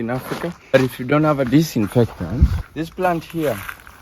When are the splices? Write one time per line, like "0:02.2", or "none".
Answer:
0:00.7
0:02.6